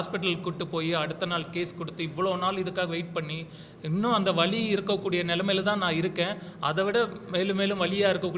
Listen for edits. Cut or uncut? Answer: uncut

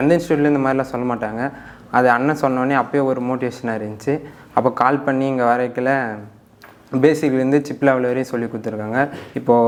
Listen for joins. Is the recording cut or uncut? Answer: uncut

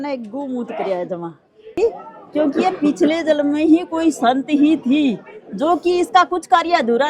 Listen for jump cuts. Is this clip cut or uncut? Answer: cut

